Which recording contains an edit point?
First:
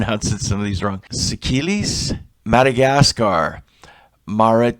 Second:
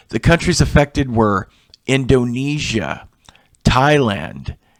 first; 2 cuts; at 1.1 s, 2.3 s

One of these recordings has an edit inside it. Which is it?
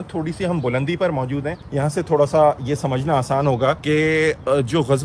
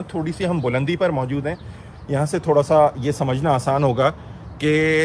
first; 2 cuts; at 1.6 s, 3.8 s

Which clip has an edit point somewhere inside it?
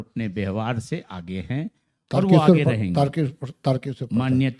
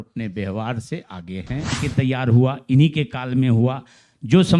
second; 1 cut; at 1.8 s

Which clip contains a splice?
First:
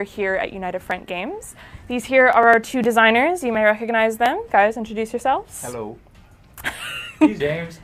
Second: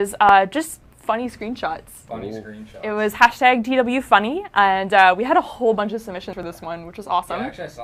second; 1 cut; at 1.2 s

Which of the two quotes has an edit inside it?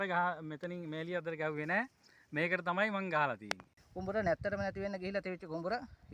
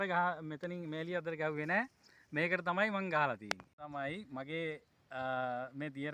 first; 1 cut; at 3.8 s

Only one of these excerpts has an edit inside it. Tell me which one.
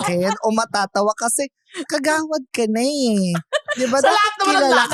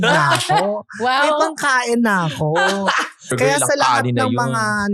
second; 1 cut; at 3.3 s

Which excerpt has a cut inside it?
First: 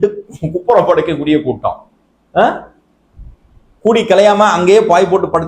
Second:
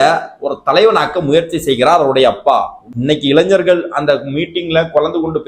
second; 1 cut; at 2.8 s

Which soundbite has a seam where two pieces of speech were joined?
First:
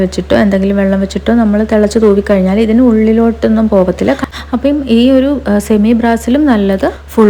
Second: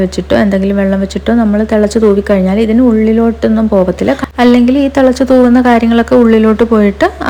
first; 1 cut; at 4.3 s

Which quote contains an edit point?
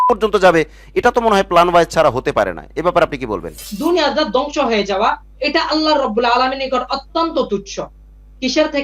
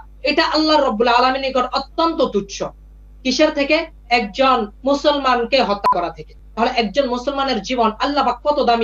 first; 1 cut; at 3.6 s

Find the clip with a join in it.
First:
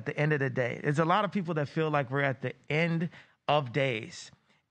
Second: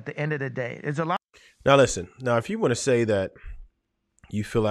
first; 1 cut; at 1.3 s

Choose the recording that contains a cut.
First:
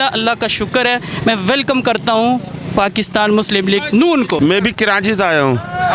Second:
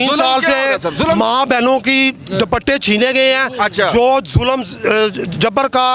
first; 1 cut; at 4.4 s

